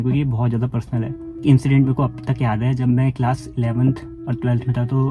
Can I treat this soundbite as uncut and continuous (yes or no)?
no